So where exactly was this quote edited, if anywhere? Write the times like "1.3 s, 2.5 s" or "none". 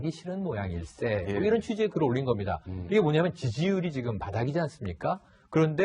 2.1 s